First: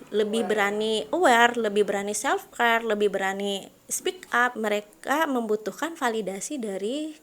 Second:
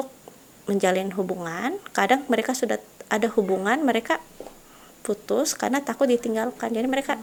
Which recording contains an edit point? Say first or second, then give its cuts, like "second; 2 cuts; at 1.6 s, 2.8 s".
first; 1 cut; at 4.5 s